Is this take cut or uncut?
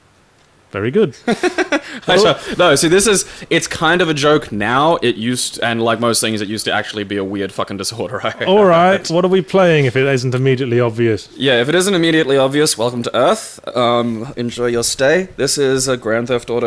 uncut